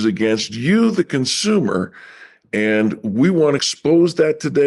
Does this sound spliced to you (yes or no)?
yes